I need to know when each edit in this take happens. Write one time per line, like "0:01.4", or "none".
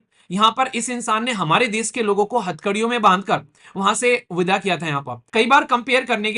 0:05.2